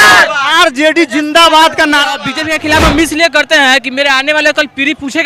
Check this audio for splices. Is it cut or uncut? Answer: cut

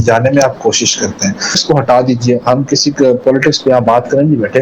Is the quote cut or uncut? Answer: cut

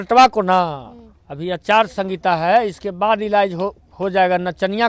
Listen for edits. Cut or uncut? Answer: uncut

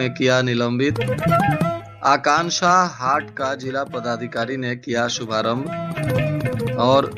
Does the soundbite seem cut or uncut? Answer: uncut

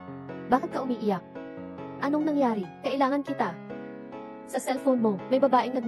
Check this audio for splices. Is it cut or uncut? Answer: uncut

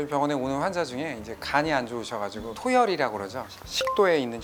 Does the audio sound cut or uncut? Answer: uncut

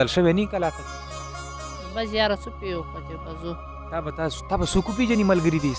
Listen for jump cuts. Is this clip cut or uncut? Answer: uncut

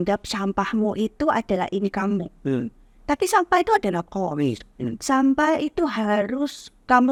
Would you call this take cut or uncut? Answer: uncut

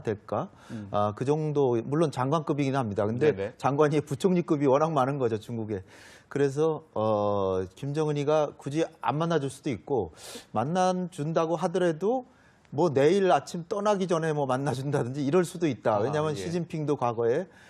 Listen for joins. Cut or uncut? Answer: cut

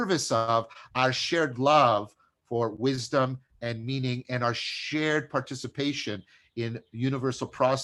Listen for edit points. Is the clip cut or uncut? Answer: uncut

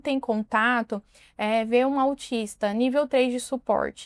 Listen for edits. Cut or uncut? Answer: uncut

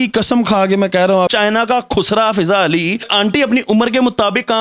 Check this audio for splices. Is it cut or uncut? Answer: cut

